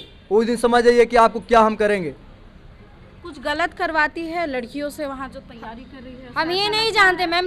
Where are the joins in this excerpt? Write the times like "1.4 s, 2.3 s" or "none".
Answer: none